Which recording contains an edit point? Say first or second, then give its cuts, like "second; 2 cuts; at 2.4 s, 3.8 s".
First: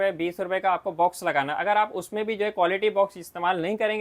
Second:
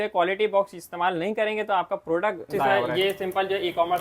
second; 1 cut; at 2.8 s